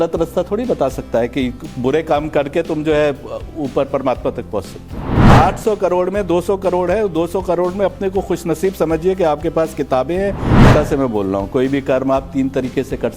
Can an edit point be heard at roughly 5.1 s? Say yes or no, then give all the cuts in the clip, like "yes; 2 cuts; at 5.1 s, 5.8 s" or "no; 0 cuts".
yes; 2 cuts; at 5.1 s, 10.6 s